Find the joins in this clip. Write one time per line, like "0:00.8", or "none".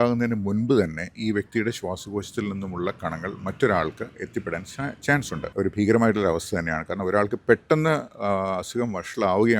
0:05.4